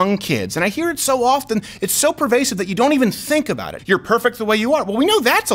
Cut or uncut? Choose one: cut